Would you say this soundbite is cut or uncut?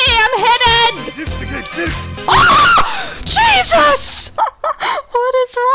uncut